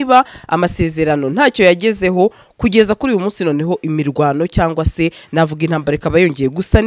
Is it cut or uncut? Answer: uncut